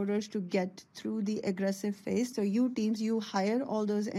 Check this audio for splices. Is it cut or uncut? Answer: cut